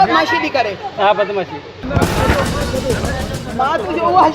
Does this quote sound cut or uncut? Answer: cut